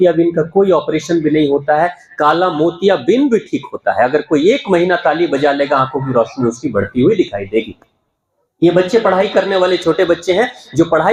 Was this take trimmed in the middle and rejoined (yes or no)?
no